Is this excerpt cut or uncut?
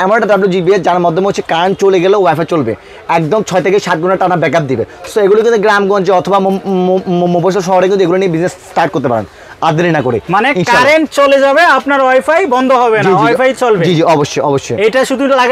uncut